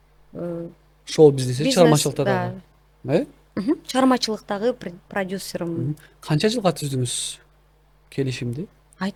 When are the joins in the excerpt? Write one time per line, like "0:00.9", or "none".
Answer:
none